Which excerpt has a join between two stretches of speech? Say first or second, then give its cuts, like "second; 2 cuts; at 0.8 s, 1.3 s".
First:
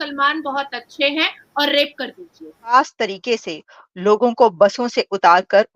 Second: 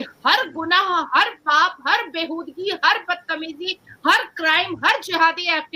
first; 1 cut; at 2.7 s